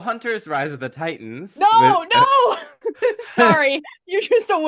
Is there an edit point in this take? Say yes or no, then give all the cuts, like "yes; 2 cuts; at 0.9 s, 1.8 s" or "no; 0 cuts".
no; 0 cuts